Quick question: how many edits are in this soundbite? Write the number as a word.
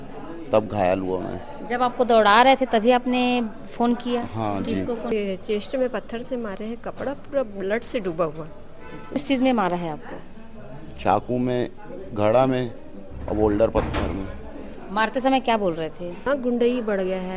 three